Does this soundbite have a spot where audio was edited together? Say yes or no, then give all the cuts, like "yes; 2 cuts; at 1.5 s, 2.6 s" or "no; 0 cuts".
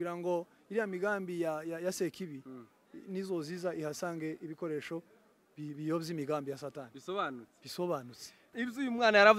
yes; 1 cut; at 8.4 s